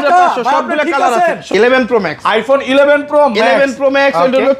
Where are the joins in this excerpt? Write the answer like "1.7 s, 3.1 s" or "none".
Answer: 1.5 s